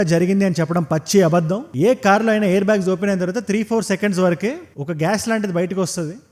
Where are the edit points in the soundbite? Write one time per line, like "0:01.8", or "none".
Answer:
none